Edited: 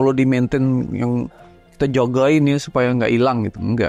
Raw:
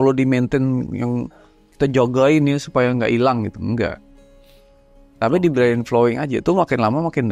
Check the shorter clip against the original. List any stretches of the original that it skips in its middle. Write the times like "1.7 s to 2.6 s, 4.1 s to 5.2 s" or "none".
none